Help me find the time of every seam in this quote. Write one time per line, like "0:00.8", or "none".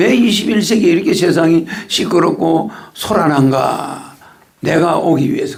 none